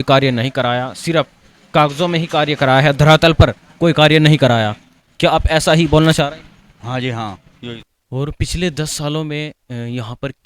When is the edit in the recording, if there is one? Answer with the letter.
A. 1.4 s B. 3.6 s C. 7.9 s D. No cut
C